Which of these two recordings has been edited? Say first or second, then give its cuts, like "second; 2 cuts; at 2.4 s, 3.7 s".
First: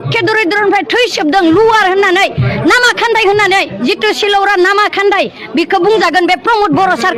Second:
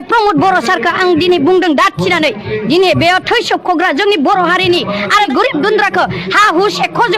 second; 1 cut; at 5.3 s